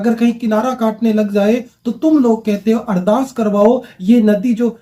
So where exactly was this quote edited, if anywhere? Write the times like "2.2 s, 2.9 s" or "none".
none